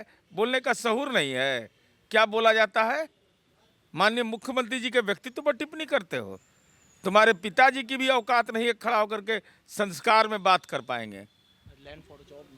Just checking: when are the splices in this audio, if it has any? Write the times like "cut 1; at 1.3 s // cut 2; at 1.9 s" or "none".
none